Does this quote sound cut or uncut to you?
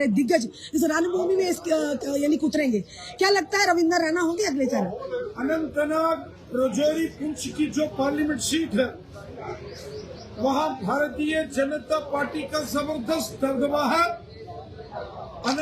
uncut